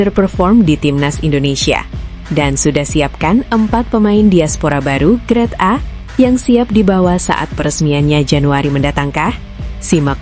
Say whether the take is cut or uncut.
uncut